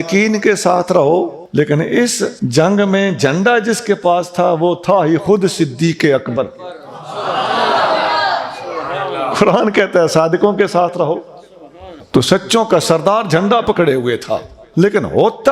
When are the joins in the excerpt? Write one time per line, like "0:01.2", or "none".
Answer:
0:01.4
0:02.4
0:11.9
0:14.6